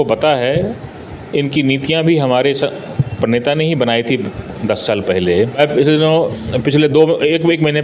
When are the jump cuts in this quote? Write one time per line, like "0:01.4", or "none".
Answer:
0:05.6